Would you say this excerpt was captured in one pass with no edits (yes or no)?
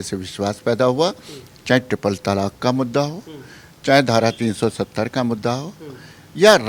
yes